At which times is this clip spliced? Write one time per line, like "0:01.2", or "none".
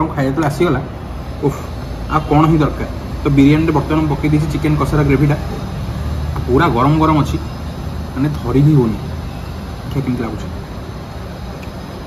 none